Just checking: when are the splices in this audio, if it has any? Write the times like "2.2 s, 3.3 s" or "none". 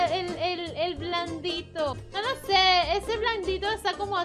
2.0 s